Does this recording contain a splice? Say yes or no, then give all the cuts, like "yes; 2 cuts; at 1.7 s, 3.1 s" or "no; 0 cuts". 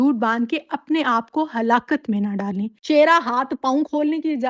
yes; 1 cut; at 2.7 s